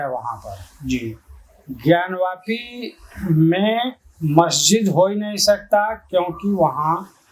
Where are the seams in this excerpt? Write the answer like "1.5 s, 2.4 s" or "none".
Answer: none